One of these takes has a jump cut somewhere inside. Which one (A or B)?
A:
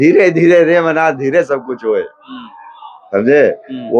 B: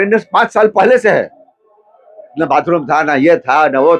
B